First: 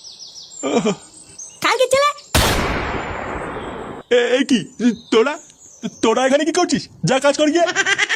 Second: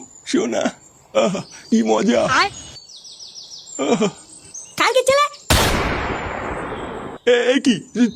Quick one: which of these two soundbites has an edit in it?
second; 1 cut; at 1.5 s

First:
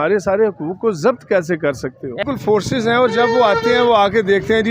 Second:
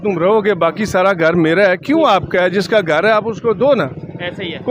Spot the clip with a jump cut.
first; 1 cut; at 2.2 s

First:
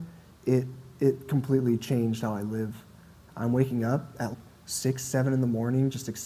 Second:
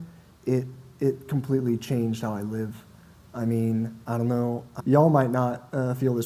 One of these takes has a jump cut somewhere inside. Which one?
first; 1 cut; at 3.2 s

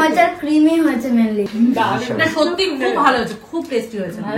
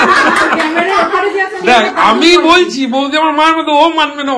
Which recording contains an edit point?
first; 1 cut; at 1.5 s

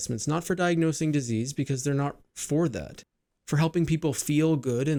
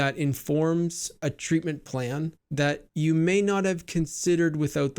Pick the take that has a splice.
second; 2 cuts; at 1.2 s, 2.8 s

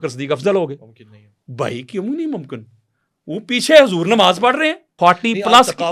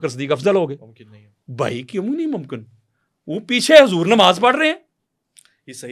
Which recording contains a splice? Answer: first; 1 cut; at 4.8 s

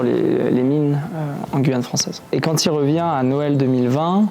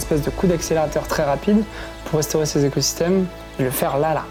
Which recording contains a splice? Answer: first; 1 cut; at 2.3 s

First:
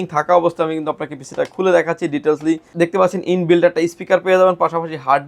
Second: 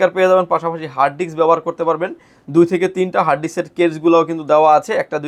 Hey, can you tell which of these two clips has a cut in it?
first; 1 cut; at 2.7 s

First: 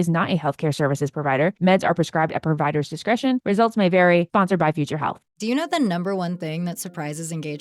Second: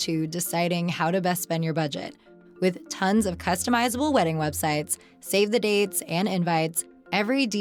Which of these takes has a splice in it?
first; 1 cut; at 5.4 s

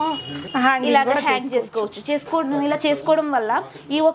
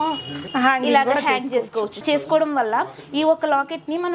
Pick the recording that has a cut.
second; 1 cut; at 2.0 s

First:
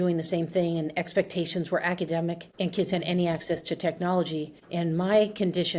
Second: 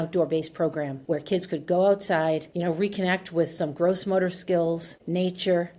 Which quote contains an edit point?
second; 2 cuts; at 1.0 s, 2.5 s

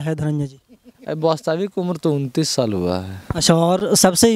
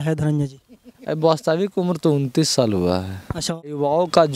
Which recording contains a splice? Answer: second; 1 cut; at 3.3 s

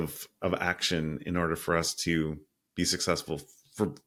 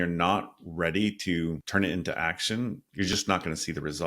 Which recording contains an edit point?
second; 2 cuts; at 1.6 s, 2.8 s

